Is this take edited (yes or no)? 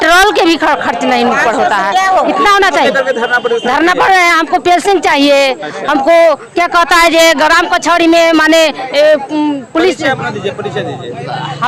no